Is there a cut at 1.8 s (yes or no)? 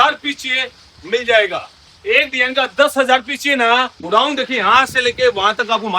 no